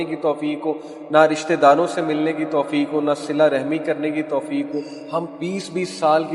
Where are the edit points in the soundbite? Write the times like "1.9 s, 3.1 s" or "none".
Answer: 5.0 s